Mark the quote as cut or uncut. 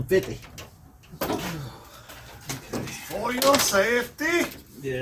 cut